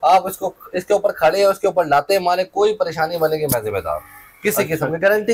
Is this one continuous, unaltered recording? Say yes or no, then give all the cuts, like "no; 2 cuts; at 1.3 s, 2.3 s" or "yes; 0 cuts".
yes; 0 cuts